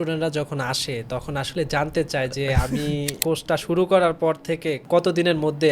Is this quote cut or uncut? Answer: cut